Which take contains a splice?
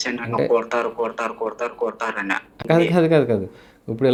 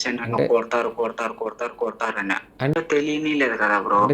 second; 1 cut; at 2.6 s

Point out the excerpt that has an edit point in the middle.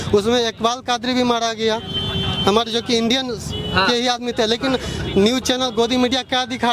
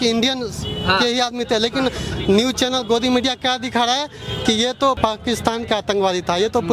second; 1 cut; at 5.0 s

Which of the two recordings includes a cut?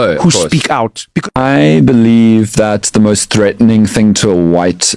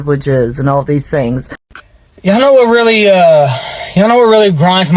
second; 1 cut; at 1.6 s

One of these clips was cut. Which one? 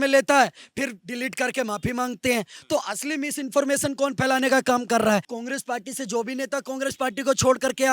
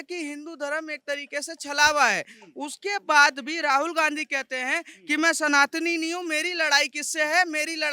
first; 1 cut; at 5.3 s

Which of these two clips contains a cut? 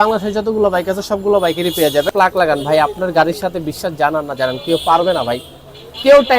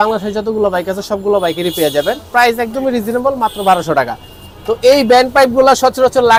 first; 1 cut; at 2.1 s

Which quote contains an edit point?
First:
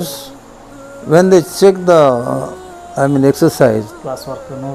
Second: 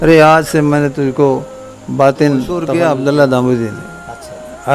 second; 1 cut; at 2.6 s

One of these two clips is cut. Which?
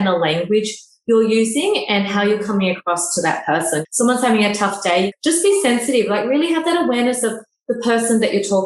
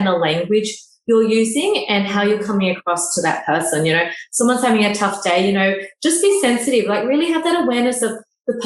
first; 2 cuts; at 3.8 s, 5.1 s

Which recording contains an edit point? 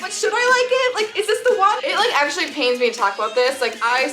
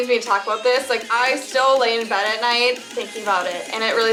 first; 1 cut; at 1.8 s

